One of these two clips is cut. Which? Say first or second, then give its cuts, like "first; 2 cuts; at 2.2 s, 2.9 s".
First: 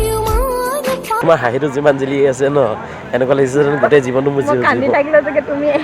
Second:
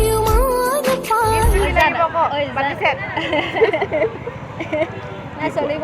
first; 1 cut; at 1.2 s